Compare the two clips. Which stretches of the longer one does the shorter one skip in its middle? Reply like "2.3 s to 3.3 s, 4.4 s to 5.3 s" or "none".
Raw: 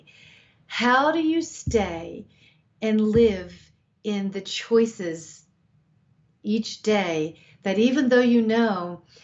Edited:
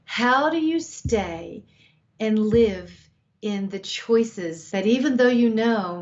5.2 s to 7.5 s